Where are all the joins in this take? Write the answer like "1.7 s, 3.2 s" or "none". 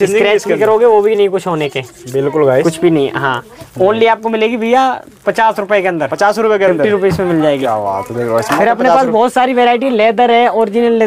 none